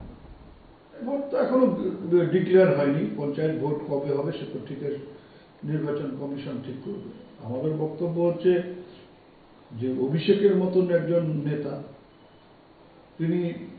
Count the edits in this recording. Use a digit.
1